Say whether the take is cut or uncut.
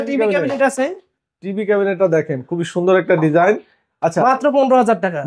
uncut